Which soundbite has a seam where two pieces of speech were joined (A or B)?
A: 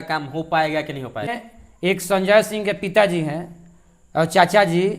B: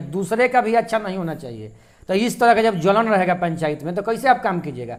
A